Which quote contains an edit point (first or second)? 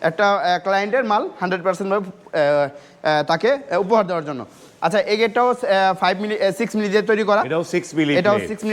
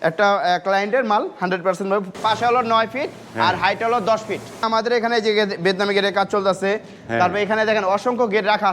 second